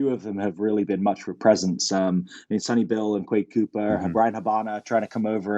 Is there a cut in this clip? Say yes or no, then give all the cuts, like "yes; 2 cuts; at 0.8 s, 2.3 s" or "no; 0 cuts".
no; 0 cuts